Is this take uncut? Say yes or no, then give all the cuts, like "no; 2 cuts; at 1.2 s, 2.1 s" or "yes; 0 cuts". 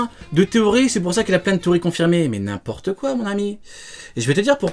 yes; 0 cuts